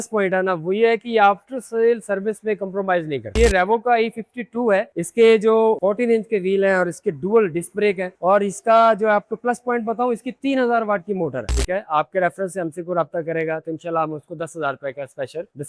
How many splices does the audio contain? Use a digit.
2